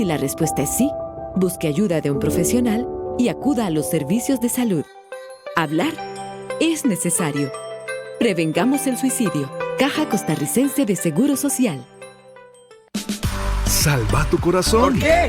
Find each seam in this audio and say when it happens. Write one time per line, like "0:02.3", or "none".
0:13.9